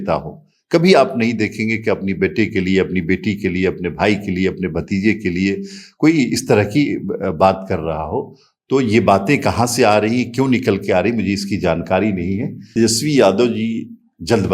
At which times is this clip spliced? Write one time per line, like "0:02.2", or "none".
0:12.7